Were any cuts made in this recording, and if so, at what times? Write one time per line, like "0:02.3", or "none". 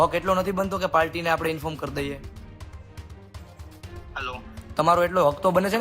none